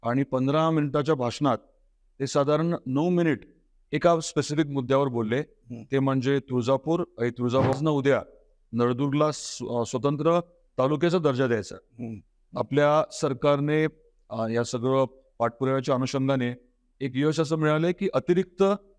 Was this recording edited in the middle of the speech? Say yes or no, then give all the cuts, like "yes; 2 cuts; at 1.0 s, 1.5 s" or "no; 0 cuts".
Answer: yes; 1 cut; at 7.7 s